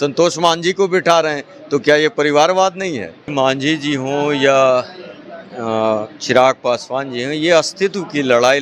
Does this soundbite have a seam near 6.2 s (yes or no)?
no